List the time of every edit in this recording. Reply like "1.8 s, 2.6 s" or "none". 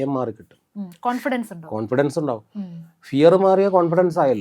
none

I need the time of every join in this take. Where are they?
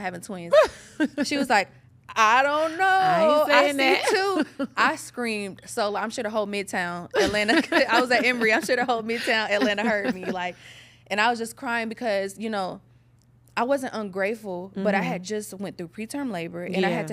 none

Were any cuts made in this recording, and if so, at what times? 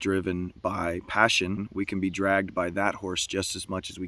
1.6 s

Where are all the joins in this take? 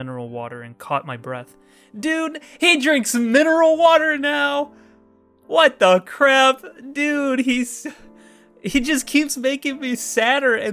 none

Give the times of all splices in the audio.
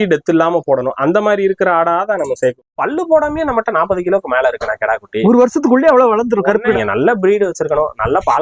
2.6 s, 6.8 s

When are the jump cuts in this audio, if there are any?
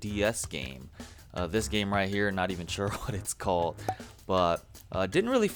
none

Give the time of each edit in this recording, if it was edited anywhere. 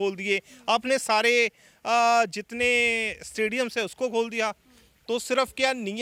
none

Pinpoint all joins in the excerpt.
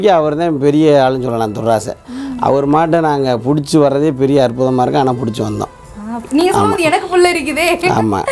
none

